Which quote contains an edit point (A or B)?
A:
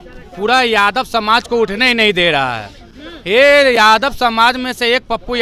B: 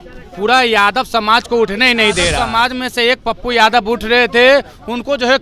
B